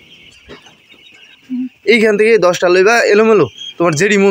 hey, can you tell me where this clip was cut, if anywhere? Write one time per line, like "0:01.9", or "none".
0:01.4